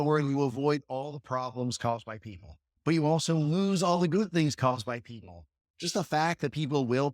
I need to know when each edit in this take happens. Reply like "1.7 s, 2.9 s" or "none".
2.6 s